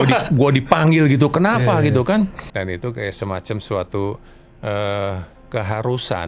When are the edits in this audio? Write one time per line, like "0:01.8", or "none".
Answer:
0:02.4